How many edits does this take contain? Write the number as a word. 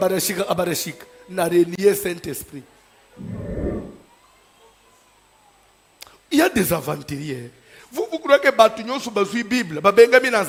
zero